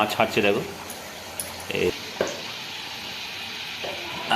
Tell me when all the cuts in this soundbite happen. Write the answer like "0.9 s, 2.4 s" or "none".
1.9 s